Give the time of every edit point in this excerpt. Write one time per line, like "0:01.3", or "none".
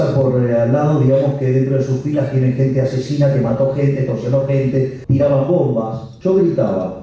0:05.0
0:06.1